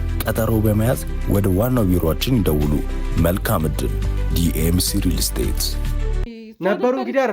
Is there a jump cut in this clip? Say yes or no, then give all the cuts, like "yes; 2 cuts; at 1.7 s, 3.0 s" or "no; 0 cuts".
yes; 1 cut; at 6.3 s